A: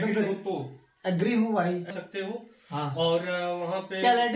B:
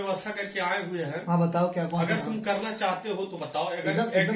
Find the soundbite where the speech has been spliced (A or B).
A